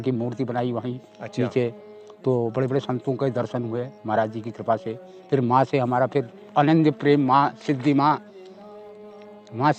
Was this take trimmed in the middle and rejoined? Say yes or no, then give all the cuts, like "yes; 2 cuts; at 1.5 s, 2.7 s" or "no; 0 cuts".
no; 0 cuts